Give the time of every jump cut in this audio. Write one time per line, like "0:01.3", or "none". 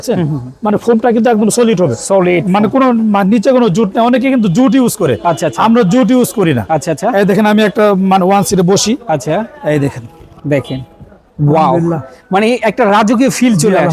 none